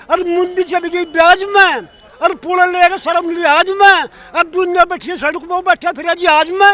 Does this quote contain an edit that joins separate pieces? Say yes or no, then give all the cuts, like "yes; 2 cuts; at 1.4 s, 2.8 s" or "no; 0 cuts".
no; 0 cuts